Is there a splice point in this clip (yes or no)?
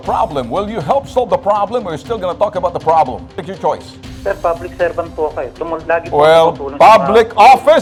no